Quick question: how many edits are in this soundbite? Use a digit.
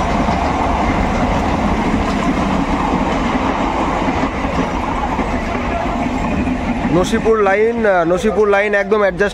0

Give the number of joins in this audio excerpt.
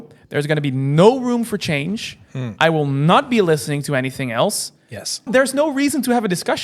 1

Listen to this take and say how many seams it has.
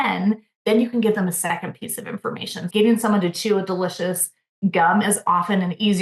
1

